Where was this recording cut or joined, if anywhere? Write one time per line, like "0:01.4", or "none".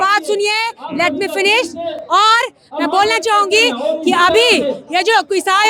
none